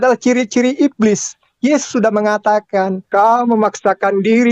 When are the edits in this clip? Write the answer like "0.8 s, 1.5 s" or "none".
3.0 s